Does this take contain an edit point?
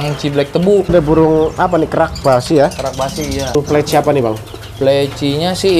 yes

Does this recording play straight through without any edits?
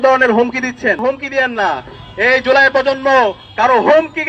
yes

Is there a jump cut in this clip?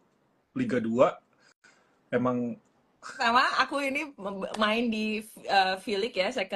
yes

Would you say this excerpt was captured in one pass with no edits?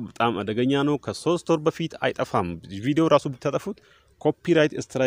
yes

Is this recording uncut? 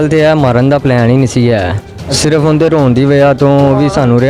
yes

